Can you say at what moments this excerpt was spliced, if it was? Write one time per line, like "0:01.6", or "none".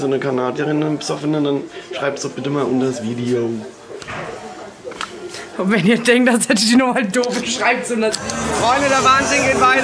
0:08.4